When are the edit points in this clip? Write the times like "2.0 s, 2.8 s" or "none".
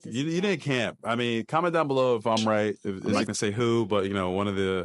3.2 s